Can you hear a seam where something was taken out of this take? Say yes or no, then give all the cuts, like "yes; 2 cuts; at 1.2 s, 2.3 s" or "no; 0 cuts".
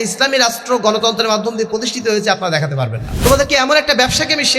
yes; 1 cut; at 3.0 s